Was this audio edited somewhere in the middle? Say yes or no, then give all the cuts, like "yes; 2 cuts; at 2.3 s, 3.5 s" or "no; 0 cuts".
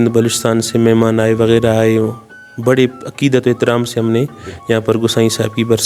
no; 0 cuts